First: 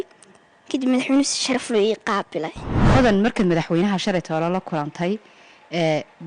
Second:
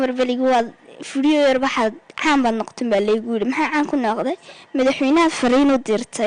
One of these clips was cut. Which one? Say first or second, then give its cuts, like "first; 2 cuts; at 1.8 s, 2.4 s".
first; 1 cut; at 2.8 s